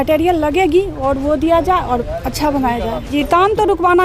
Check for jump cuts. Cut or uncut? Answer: cut